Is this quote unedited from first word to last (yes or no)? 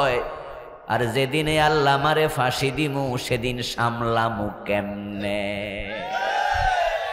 yes